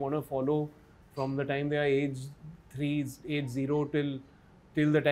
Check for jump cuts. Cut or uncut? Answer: uncut